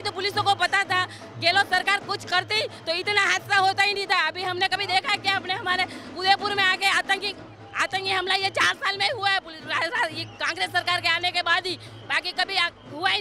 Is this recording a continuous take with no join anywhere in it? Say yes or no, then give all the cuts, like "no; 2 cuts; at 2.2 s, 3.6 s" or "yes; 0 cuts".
yes; 0 cuts